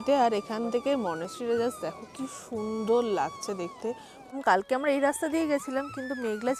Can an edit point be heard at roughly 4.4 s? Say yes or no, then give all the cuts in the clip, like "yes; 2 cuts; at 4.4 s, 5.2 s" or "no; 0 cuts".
yes; 1 cut; at 4.4 s